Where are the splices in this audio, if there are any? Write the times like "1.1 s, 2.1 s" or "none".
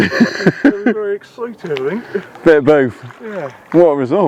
none